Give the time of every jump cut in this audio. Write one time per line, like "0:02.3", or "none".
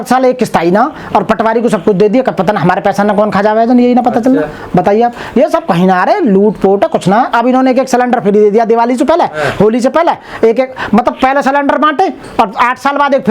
none

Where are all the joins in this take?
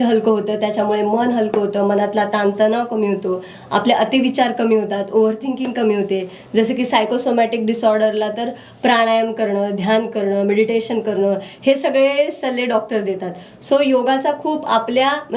none

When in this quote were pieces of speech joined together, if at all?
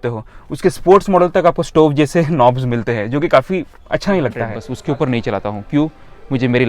0:04.6

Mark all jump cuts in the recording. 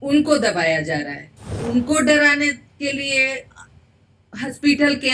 0:01.6

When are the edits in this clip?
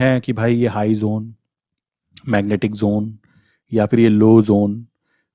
none

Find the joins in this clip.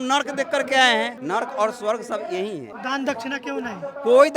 0:01.2
0:02.7

